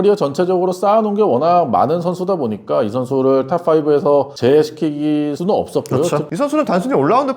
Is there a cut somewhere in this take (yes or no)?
yes